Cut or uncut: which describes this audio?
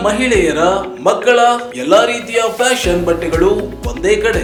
uncut